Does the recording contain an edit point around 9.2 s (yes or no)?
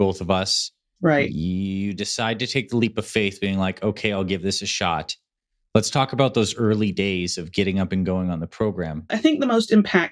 yes